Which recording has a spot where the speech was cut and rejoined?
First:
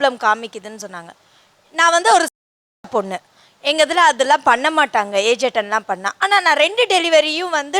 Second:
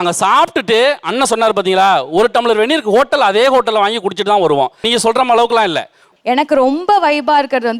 second; 1 cut; at 6.1 s

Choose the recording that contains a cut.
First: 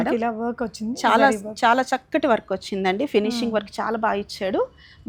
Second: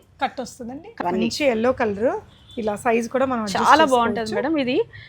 second; 1 cut; at 0.9 s

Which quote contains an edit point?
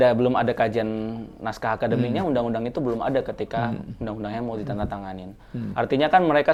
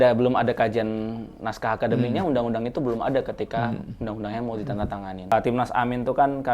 second; 1 cut; at 5.3 s

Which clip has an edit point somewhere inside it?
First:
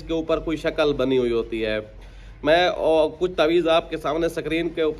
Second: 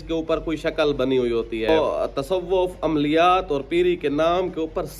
second; 1 cut; at 1.7 s

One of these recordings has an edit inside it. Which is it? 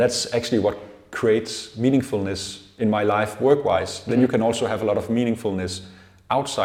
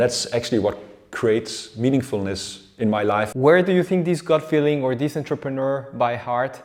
second; 1 cut; at 3.3 s

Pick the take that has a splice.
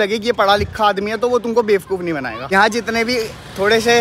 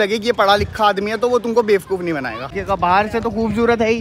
second; 1 cut; at 2.5 s

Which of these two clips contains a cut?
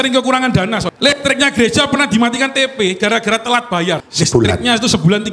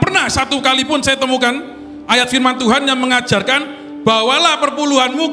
first; 2 cuts; at 0.9 s, 4.1 s

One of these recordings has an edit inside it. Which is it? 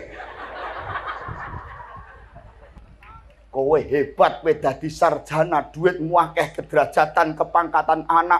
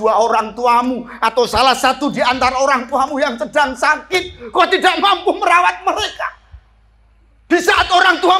first; 1 cut; at 2.7 s

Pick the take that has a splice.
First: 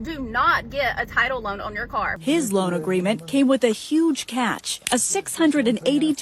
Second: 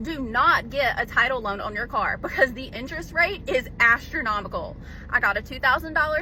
first; 1 cut; at 2.1 s

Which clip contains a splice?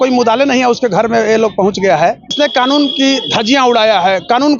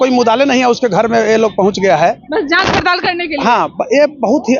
first; 1 cut; at 2.3 s

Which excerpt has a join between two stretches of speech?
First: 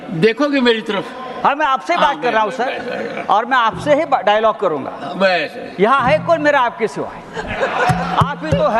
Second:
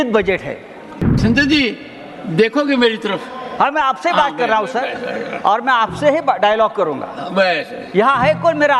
second; 1 cut; at 1.0 s

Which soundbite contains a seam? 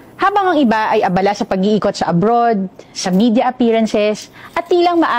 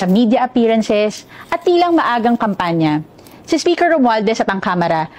second; 1 cut; at 3.3 s

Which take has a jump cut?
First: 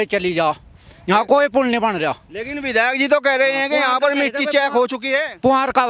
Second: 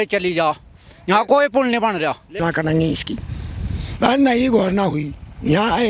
second; 1 cut; at 2.4 s

